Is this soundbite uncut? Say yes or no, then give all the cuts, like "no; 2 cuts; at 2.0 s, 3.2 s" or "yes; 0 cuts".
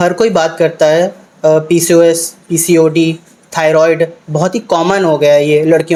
yes; 0 cuts